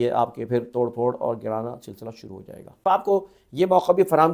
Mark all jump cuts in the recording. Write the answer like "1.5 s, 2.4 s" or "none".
2.8 s